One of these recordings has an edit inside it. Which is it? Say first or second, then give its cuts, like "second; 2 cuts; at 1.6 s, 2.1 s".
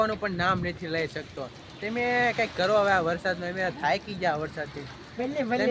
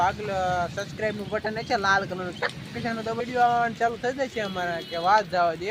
second; 1 cut; at 3.2 s